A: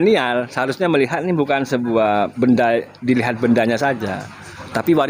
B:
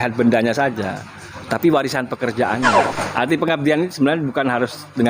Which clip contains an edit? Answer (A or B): B